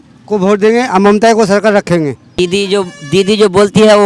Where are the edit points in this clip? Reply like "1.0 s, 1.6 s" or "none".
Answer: 2.3 s